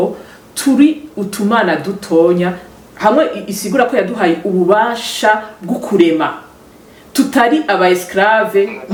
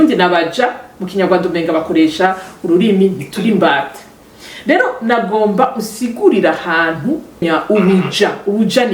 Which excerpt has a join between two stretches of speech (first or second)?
second